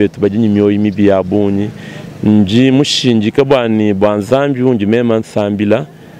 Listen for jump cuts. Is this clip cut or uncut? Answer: uncut